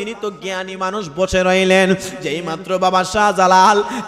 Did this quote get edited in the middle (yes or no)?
no